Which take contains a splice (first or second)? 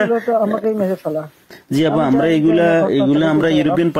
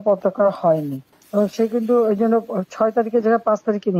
second